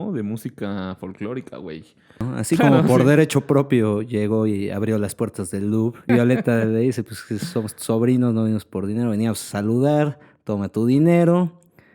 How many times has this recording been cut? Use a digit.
2